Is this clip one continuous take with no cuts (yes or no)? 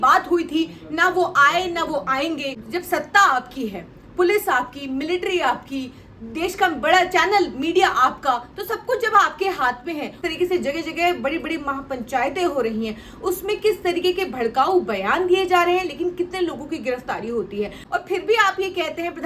no